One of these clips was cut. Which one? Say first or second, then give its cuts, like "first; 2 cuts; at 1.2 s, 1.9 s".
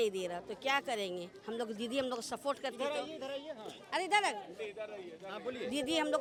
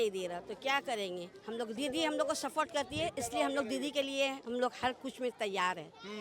second; 1 cut; at 1.8 s